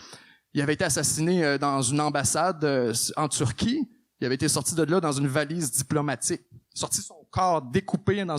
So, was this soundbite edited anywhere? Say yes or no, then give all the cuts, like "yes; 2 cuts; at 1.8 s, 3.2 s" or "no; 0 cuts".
no; 0 cuts